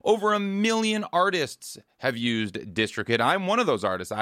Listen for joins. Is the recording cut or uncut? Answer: uncut